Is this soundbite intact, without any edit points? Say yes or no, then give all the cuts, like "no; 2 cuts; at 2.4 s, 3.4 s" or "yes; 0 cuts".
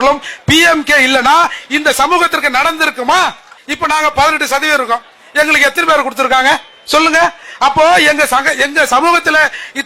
no; 1 cut; at 3.6 s